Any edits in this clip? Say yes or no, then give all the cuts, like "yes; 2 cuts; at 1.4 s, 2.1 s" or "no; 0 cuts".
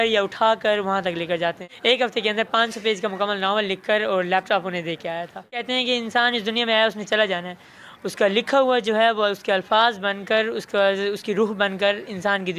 yes; 2 cuts; at 1.7 s, 5.6 s